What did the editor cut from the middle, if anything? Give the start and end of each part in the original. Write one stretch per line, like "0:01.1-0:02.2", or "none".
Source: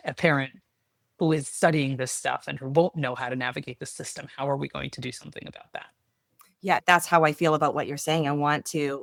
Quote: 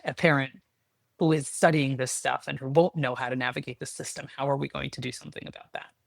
none

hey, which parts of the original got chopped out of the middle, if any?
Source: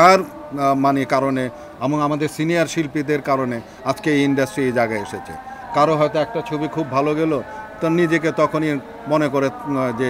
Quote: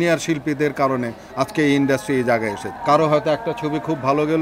0:05.1-0:05.5

